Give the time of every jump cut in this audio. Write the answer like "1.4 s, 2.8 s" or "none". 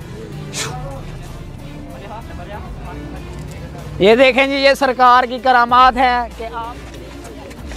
none